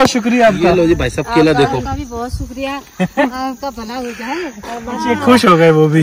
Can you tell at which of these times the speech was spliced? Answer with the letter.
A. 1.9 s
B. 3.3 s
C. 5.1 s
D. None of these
C